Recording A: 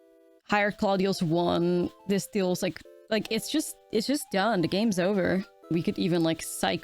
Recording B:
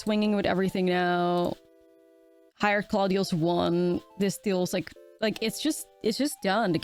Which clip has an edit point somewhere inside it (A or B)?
A